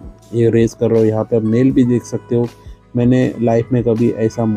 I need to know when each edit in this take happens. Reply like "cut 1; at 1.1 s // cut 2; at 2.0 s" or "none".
none